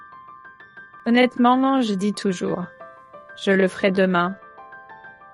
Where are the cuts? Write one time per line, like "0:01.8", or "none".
0:01.0